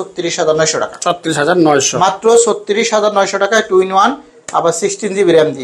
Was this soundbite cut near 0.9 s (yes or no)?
no